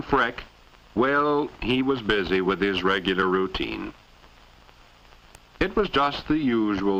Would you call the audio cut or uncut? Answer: uncut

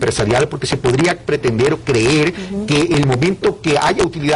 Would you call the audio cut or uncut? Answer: uncut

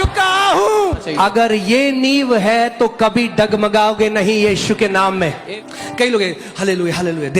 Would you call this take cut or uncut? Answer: cut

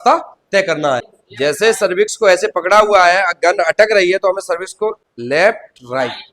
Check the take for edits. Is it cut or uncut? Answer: cut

